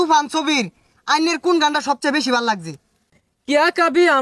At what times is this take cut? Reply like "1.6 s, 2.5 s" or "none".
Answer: 3.0 s